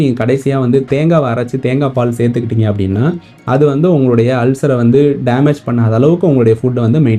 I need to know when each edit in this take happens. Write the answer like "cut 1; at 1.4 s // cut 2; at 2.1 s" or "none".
none